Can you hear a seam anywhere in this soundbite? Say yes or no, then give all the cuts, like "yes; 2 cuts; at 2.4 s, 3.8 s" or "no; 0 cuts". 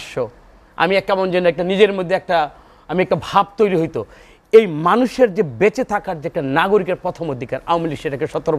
no; 0 cuts